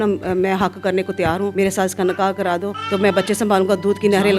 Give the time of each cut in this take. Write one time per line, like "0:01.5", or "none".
0:01.5
0:02.7